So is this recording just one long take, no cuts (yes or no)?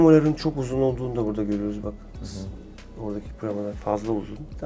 yes